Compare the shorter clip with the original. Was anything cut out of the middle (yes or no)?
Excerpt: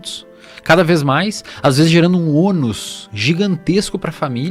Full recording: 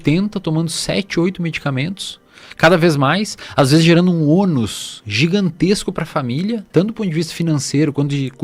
no